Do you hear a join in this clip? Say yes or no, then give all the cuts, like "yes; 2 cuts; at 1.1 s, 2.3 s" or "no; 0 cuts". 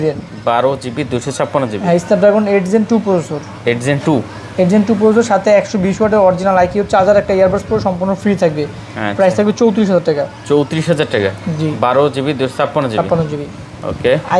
no; 0 cuts